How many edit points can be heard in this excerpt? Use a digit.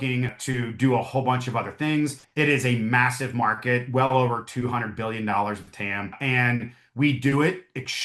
0